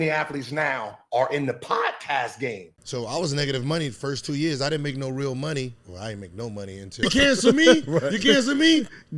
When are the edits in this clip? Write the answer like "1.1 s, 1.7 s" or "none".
2.7 s, 7.1 s